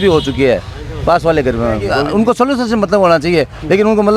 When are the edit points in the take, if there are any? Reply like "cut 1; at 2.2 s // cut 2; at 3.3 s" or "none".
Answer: cut 1; at 1.9 s